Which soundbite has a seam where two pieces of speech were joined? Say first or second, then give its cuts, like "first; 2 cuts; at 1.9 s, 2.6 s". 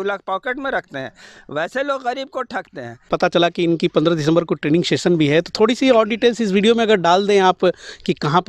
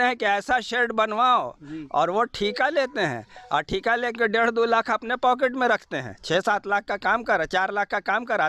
first; 1 cut; at 3.1 s